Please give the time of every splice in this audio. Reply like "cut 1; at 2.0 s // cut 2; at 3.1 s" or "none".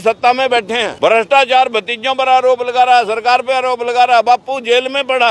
cut 1; at 0.9 s